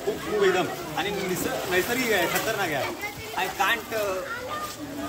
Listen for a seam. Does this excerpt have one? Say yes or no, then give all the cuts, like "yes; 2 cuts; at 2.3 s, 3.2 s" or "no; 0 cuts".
no; 0 cuts